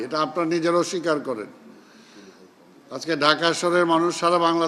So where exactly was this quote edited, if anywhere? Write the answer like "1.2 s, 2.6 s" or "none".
none